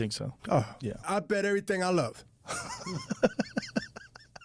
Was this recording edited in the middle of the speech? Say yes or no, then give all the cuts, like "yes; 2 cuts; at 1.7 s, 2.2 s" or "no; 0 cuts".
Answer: yes; 1 cut; at 1.0 s